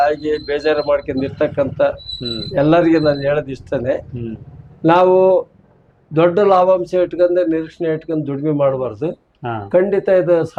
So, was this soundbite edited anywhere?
no; 0 cuts

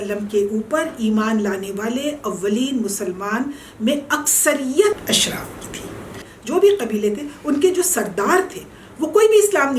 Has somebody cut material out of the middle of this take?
yes; 2 cuts; at 5.0 s, 6.3 s

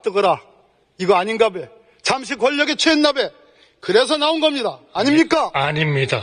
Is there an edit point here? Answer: no; 0 cuts

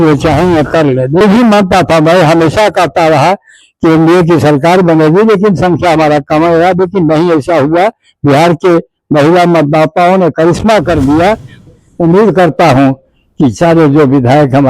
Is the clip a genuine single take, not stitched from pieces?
no; 2 cuts; at 1.2 s, 11.5 s

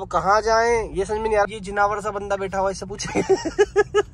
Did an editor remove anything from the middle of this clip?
yes; 1 cut; at 1.4 s

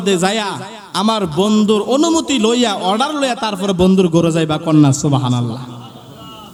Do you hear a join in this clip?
no; 0 cuts

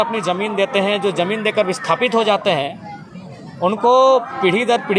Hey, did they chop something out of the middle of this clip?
no; 0 cuts

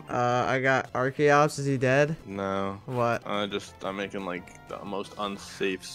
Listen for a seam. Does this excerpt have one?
no; 0 cuts

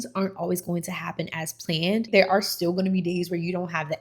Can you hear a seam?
yes; 1 cut; at 2.1 s

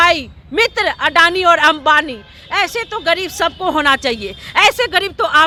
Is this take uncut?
yes; 0 cuts

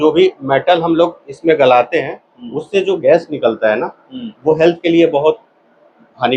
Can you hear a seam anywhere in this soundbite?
no; 0 cuts

